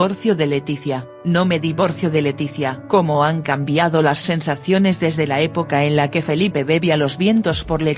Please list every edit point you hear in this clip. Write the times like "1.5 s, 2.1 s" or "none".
1.0 s